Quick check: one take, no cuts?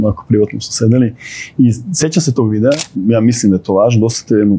no; 1 cut; at 2.9 s

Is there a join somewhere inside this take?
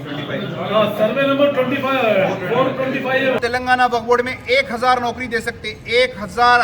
yes; 1 cut; at 3.4 s

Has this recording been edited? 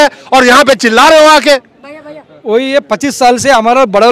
no; 0 cuts

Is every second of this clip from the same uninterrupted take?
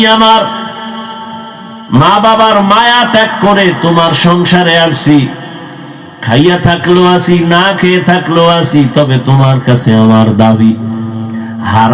yes; 0 cuts

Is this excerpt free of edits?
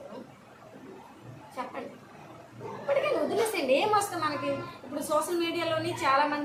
yes; 0 cuts

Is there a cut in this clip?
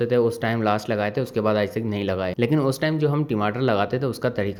no; 0 cuts

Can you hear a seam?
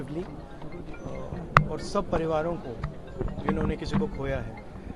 no; 0 cuts

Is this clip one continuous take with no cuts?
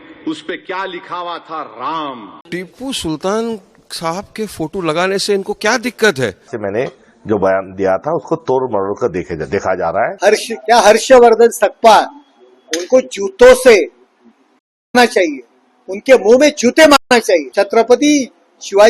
no; 4 cuts; at 2.3 s, 6.5 s, 10.1 s, 17.5 s

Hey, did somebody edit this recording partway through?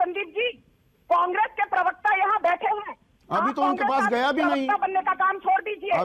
no; 0 cuts

